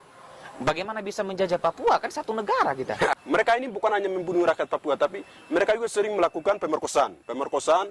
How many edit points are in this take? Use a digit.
1